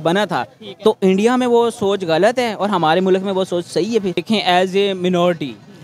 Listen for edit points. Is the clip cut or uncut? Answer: cut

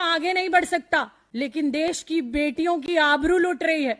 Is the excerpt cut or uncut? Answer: cut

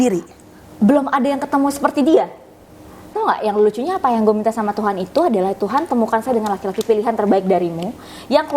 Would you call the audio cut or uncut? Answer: cut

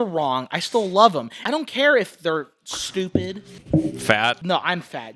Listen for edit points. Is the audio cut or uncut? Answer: cut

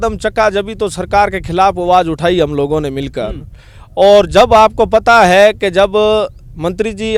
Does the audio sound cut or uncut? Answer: uncut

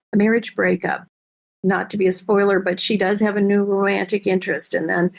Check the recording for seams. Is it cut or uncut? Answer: uncut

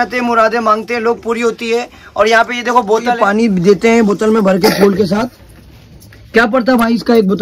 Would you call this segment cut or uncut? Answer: cut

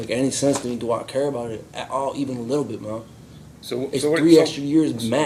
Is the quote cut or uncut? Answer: uncut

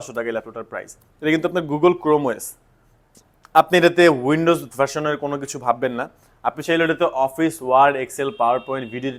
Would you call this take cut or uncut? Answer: uncut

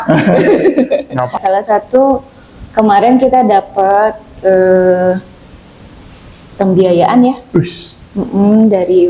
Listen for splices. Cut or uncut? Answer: cut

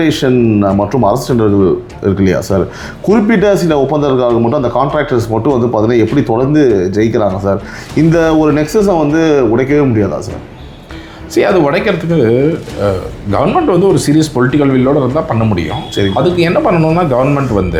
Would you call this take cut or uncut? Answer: uncut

